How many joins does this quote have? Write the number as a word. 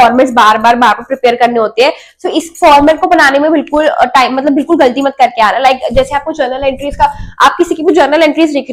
zero